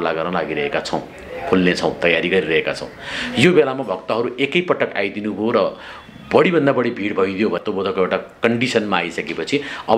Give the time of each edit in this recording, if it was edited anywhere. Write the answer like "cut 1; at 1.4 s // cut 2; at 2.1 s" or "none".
cut 1; at 7.6 s